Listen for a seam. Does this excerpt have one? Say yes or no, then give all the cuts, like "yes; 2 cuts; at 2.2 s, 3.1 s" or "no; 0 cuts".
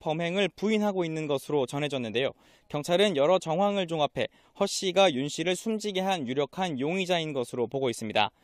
yes; 1 cut; at 3.4 s